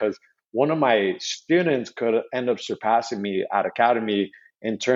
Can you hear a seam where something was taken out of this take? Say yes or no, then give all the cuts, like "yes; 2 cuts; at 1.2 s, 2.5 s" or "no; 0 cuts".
no; 0 cuts